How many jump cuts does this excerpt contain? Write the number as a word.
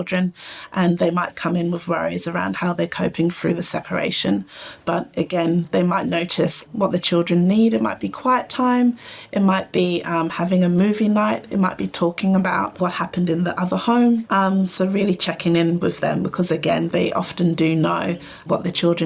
three